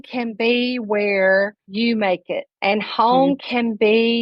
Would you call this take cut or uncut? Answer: cut